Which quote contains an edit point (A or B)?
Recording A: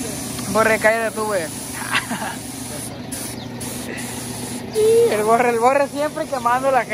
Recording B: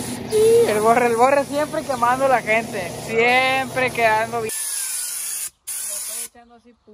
B